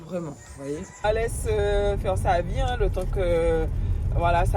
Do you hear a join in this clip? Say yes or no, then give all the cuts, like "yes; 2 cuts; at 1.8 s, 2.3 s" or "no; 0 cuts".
yes; 1 cut; at 1.0 s